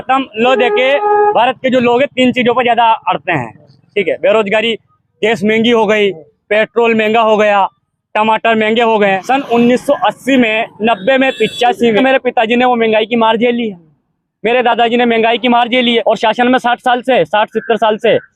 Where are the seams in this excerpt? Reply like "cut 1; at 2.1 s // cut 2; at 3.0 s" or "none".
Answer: cut 1; at 9.2 s // cut 2; at 12.0 s // cut 3; at 16.0 s